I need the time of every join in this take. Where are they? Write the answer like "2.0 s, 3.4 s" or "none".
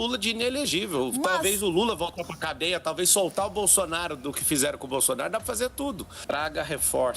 6.1 s